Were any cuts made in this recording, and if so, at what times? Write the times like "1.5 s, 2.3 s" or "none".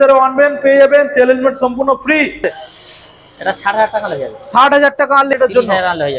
2.5 s, 5.3 s